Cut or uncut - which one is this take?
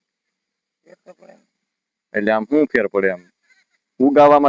uncut